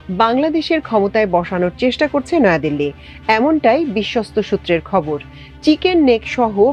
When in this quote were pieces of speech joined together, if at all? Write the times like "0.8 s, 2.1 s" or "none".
none